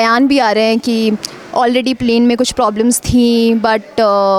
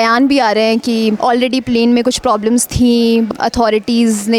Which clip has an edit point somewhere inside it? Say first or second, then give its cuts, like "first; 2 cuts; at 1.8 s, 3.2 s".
second; 2 cuts; at 1.2 s, 3.3 s